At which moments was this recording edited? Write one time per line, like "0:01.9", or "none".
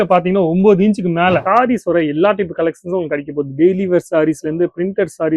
0:01.4